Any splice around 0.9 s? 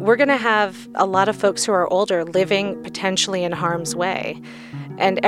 yes; 1 cut; at 0.9 s

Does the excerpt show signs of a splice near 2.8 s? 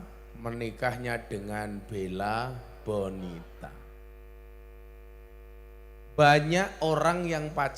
no; 1 cut; at 5.3 s

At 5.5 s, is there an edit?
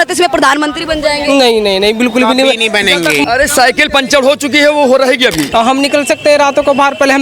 yes; 2 cuts; at 3.2 s, 5.5 s

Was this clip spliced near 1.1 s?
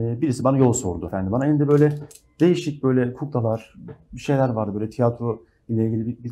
yes; 1 cut; at 1.1 s

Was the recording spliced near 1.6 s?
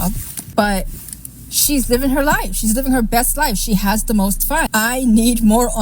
no; 1 cut; at 4.7 s

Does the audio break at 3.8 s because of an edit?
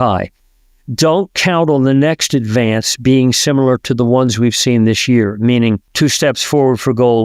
no; 1 cut; at 5.9 s

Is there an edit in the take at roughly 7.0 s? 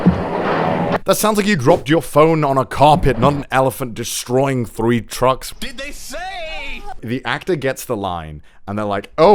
yes; 3 cuts; at 1.0 s, 5.5 s, 7.0 s

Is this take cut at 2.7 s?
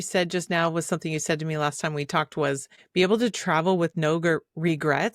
yes; 1 cut; at 2.7 s

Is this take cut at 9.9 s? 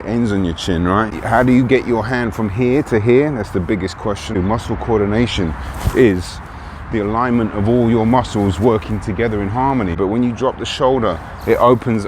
yes; 3 cuts; at 1.1 s, 4.4 s, 9.9 s

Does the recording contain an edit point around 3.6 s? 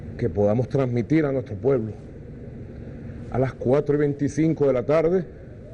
yes; 1 cut; at 3.6 s

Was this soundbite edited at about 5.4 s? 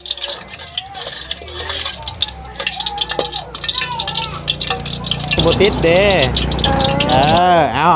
yes; 1 cut; at 5.4 s

